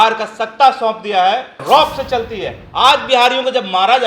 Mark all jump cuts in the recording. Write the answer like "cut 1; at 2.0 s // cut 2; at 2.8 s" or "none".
cut 1; at 1.6 s